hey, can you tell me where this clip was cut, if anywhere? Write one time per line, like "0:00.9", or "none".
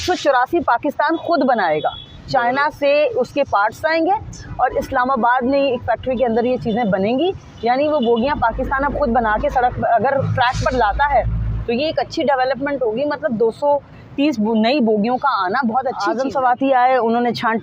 0:16.1